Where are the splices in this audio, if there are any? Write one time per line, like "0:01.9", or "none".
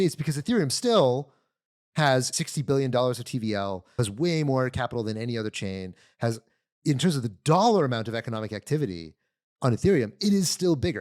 0:02.3
0:04.0